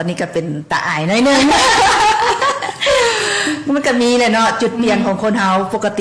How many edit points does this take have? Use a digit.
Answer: 0